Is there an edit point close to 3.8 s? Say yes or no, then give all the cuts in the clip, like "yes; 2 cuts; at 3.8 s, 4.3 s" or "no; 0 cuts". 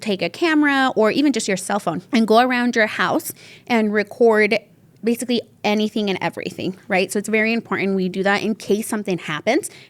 no; 2 cuts; at 2.0 s, 6.8 s